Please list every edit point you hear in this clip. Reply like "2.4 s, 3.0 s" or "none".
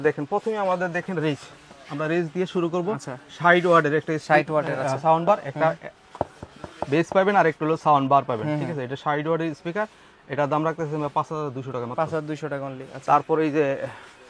none